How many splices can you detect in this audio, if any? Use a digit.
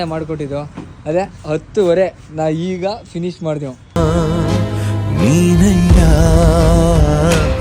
0